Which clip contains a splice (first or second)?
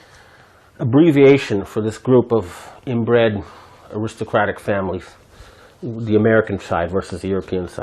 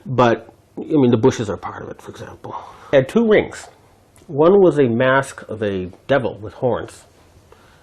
second